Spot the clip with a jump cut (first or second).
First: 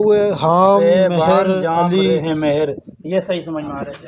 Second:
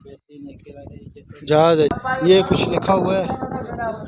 second